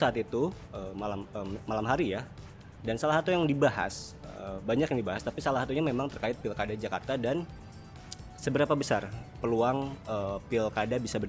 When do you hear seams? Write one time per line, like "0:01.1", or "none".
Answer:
none